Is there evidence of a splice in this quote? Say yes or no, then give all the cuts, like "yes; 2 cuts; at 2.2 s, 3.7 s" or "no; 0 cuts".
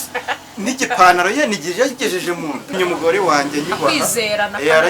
yes; 1 cut; at 2.7 s